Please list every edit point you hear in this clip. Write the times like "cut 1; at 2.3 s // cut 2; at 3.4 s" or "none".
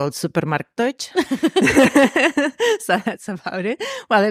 none